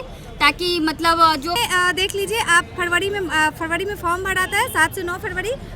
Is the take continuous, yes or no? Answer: no